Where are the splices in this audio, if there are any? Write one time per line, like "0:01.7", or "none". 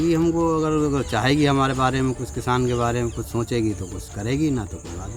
none